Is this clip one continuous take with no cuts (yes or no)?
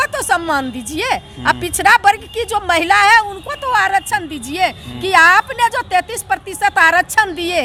yes